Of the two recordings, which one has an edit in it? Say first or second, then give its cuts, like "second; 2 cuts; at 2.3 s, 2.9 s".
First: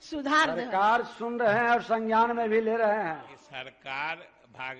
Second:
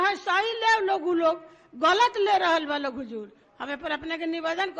first; 1 cut; at 3.4 s